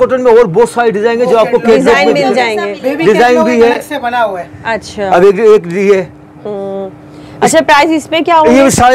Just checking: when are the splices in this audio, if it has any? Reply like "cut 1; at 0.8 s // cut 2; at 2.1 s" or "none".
none